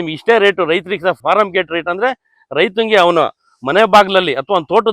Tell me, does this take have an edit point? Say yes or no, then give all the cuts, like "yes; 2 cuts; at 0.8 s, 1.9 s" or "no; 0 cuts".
yes; 1 cut; at 1.2 s